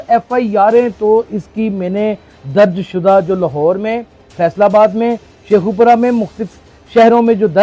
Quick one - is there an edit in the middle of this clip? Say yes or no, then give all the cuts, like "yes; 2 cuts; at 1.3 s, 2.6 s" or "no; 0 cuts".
no; 0 cuts